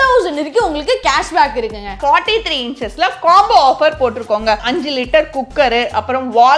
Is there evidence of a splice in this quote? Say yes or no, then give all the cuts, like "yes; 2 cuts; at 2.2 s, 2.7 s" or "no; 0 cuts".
yes; 2 cuts; at 2.0 s, 4.6 s